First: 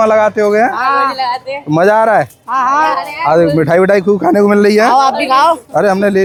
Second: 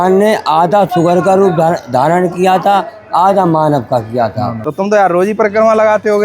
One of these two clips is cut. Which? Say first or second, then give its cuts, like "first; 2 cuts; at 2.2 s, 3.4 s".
second; 2 cuts; at 0.9 s, 4.5 s